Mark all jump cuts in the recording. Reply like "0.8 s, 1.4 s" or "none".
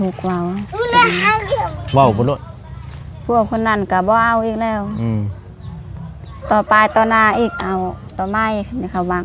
1.8 s